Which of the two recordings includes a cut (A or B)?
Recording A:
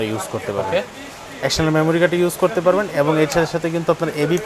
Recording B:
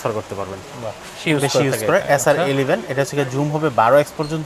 B